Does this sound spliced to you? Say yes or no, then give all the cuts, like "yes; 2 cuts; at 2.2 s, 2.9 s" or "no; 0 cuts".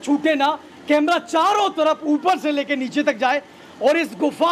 no; 0 cuts